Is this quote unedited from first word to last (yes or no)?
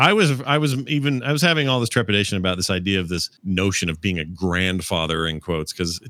yes